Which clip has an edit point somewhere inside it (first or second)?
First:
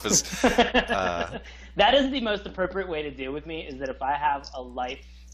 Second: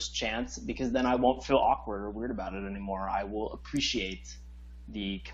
first